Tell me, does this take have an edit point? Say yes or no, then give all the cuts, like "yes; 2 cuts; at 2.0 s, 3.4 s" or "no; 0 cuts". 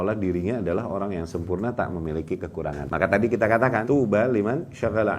yes; 2 cuts; at 2.8 s, 3.8 s